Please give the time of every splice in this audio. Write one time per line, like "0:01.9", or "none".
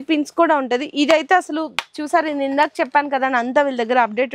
none